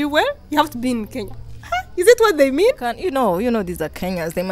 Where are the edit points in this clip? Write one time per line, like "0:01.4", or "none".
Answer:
0:03.0